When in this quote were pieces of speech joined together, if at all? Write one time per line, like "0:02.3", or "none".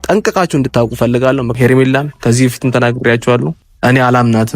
0:01.5
0:03.6